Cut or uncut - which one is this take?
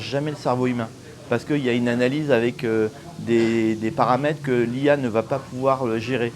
uncut